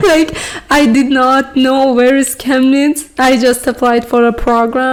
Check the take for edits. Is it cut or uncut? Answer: uncut